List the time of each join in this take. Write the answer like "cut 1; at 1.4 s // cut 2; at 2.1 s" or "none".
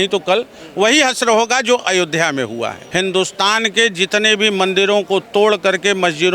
cut 1; at 2.8 s